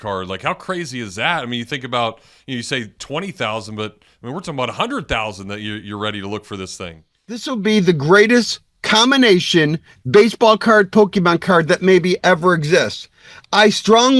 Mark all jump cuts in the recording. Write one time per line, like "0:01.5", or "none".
0:07.5